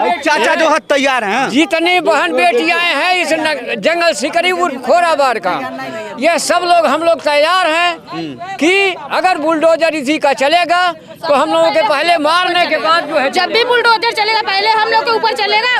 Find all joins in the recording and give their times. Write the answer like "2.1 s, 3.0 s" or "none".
none